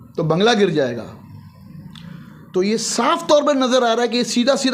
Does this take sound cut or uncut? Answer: uncut